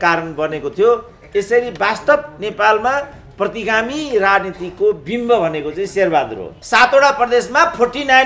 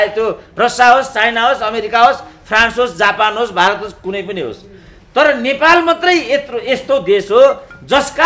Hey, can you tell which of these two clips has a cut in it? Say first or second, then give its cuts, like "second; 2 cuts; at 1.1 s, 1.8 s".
first; 1 cut; at 6.6 s